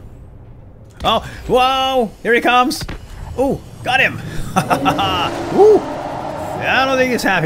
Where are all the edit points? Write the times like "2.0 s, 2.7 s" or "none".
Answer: none